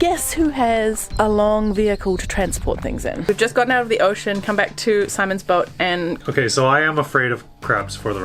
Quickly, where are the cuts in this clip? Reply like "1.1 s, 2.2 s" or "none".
1.1 s, 3.3 s, 6.2 s